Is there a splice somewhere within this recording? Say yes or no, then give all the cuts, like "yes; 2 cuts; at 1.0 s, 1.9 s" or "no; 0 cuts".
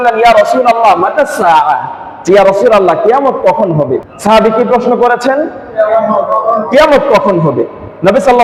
no; 0 cuts